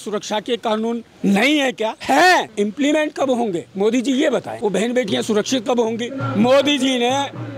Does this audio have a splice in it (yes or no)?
yes